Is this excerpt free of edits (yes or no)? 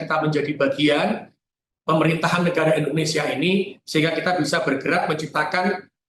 yes